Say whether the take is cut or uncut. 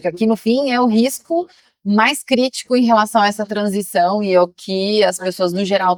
uncut